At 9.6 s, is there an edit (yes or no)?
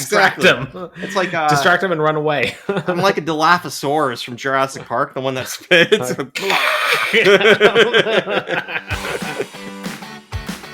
yes